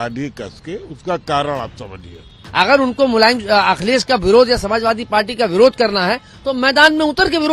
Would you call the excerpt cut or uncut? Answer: cut